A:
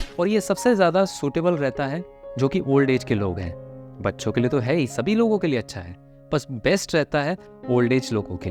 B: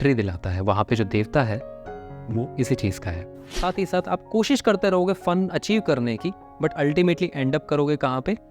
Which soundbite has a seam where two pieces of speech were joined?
B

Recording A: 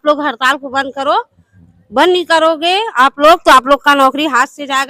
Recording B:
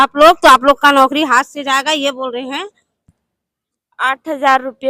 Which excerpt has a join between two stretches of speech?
B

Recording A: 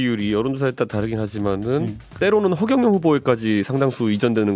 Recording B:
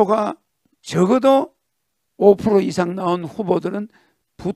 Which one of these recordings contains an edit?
A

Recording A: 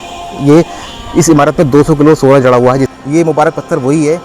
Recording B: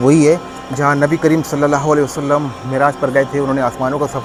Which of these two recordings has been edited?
A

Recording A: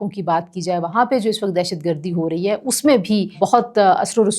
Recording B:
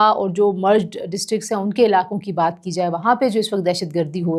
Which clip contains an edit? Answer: A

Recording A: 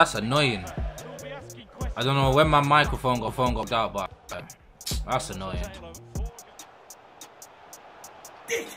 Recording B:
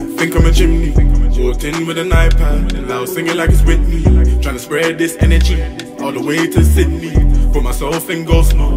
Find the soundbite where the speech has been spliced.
A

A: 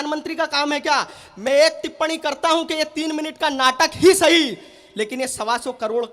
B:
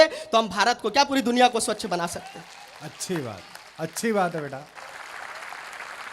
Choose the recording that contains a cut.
B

